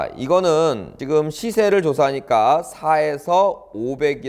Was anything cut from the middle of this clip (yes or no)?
yes